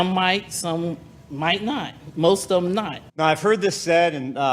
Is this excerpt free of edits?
no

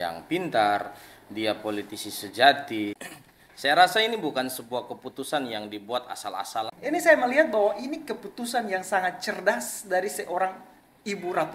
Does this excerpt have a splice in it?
yes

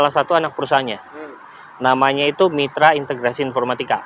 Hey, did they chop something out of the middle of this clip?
no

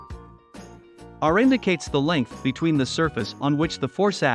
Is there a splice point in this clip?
yes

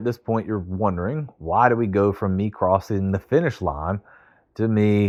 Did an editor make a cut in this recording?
no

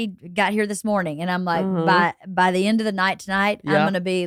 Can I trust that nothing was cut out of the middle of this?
yes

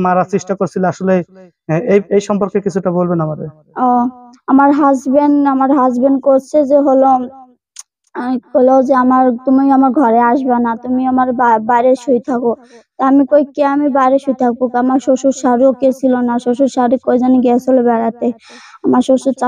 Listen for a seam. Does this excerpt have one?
no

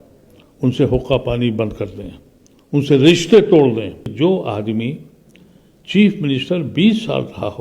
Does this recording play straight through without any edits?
no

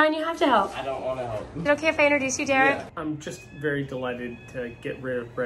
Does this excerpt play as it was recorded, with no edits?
no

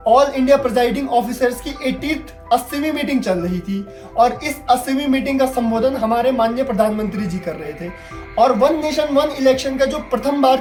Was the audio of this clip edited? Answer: no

